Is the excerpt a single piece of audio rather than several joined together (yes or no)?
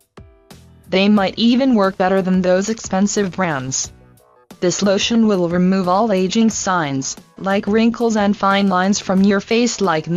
yes